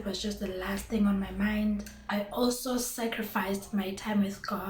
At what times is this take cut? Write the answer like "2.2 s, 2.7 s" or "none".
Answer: 1.9 s

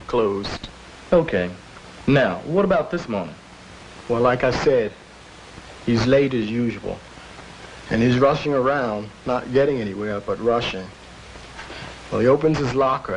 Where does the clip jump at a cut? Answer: 5.9 s

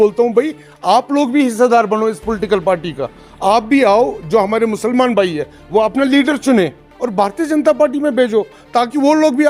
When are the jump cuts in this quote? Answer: none

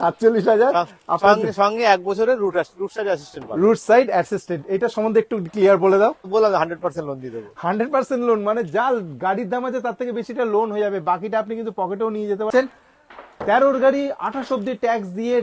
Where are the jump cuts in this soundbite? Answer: 6.3 s, 12.5 s

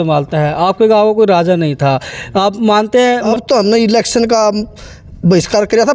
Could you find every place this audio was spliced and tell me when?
3.3 s

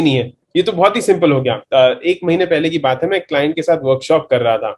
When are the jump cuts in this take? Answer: 1.6 s

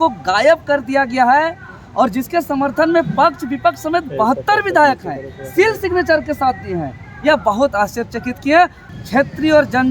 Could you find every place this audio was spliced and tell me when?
8.9 s

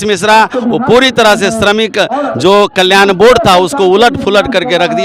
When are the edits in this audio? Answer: none

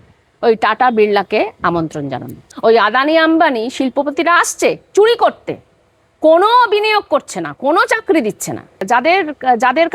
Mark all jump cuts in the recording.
2.4 s, 8.8 s

